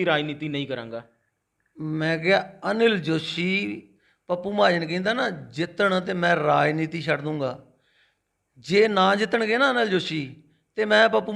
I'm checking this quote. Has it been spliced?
no; 0 cuts

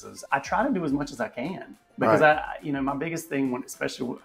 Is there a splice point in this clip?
no; 0 cuts

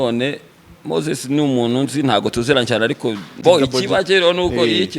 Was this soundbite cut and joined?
yes; 1 cut; at 3.4 s

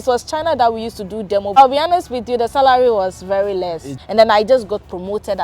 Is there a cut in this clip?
yes; 2 cuts; at 1.6 s, 3.9 s

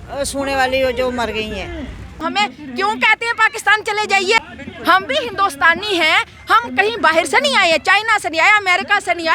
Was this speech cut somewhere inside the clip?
yes; 2 cuts; at 2.2 s, 4.4 s

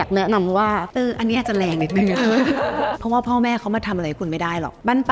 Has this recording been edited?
yes; 2 cuts; at 0.9 s, 3.0 s

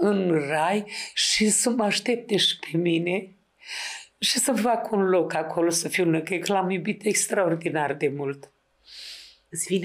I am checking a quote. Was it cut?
no; 0 cuts

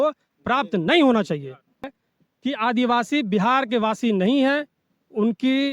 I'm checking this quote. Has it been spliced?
yes; 1 cut; at 2.0 s

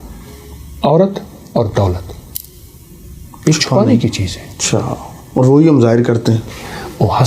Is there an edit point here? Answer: no; 0 cuts

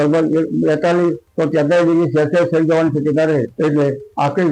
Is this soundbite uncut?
no; 1 cut; at 3.5 s

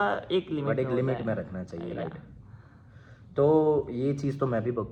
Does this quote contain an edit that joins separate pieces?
no; 0 cuts

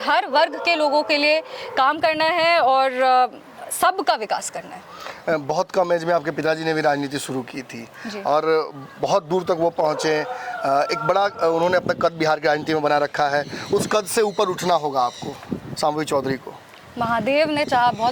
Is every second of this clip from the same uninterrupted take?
yes; 0 cuts

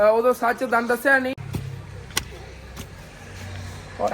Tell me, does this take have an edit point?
yes; 1 cut; at 1.3 s

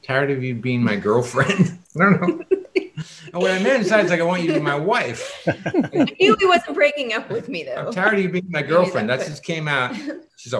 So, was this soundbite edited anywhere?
no; 0 cuts

